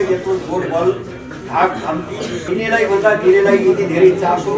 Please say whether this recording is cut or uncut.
cut